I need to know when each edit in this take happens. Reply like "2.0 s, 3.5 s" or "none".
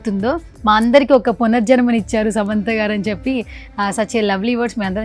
none